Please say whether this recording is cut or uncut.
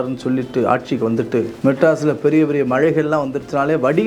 cut